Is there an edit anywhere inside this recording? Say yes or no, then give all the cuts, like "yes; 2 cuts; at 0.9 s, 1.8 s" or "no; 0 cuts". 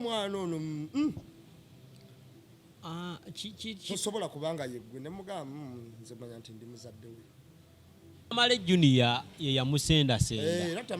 yes; 1 cut; at 8.3 s